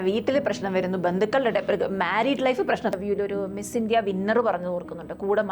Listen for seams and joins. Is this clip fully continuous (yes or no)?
no